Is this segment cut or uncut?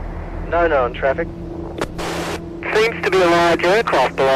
cut